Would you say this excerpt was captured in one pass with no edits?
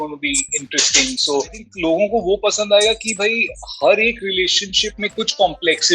no; 1 cut; at 1.7 s

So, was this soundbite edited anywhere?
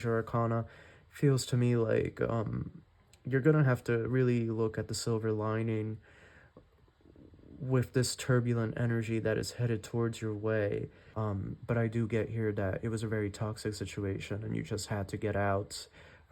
yes; 1 cut; at 11.0 s

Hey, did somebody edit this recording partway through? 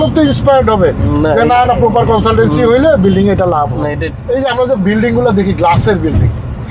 yes; 1 cut; at 4.1 s

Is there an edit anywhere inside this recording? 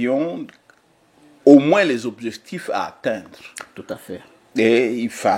no; 0 cuts

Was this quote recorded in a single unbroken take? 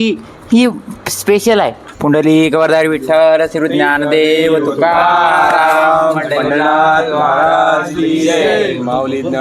no; 1 cut; at 1.8 s

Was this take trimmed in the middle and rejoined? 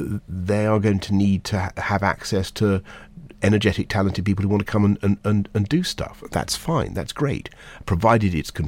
no; 0 cuts

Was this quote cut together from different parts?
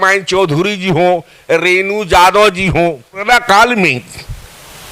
yes; 1 cut; at 3.2 s

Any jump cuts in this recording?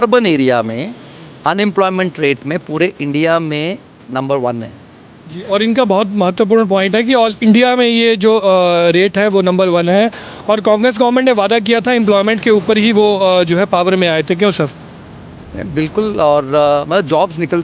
no; 0 cuts

